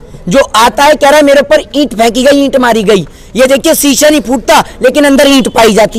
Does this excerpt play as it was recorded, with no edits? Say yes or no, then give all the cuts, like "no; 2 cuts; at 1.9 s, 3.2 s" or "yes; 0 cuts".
yes; 0 cuts